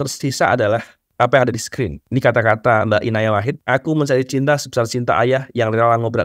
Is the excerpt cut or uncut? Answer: cut